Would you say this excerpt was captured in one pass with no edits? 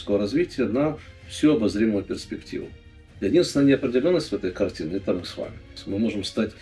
no; 1 cut; at 5.7 s

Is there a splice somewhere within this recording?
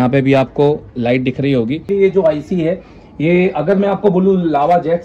yes; 1 cut; at 1.9 s

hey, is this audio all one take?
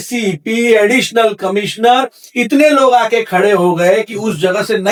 yes; 0 cuts

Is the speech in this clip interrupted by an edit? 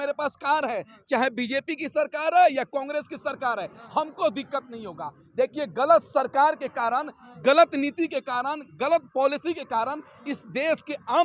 no; 0 cuts

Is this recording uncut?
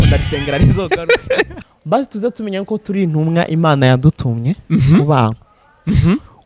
no; 1 cut; at 1.6 s

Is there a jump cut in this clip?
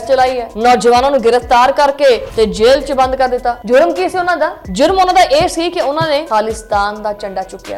yes; 2 cuts; at 2.3 s, 6.3 s

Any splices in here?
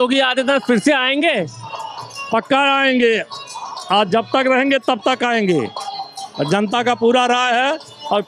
no; 0 cuts

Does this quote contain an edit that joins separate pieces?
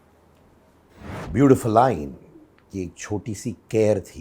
yes; 1 cut; at 1.1 s

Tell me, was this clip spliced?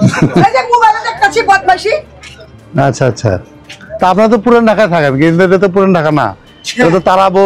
no; 0 cuts

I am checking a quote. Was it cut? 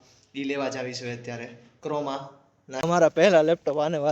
yes; 1 cut; at 2.7 s

